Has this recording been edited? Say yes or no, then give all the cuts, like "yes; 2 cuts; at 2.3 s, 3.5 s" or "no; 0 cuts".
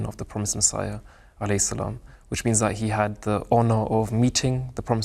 no; 0 cuts